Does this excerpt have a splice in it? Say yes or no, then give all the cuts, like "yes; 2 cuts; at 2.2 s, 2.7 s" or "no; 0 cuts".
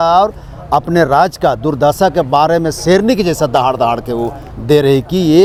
no; 0 cuts